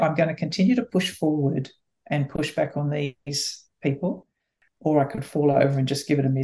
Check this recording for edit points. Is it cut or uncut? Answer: uncut